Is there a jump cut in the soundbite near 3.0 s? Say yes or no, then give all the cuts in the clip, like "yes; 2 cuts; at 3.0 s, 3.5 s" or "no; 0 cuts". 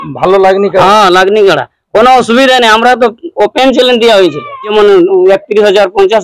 no; 1 cut; at 4.7 s